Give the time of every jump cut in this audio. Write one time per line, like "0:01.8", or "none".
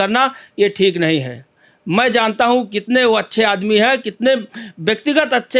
none